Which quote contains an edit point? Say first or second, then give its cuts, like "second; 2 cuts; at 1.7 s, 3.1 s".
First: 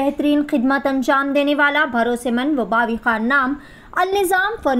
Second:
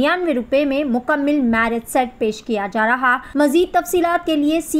second; 1 cut; at 3.2 s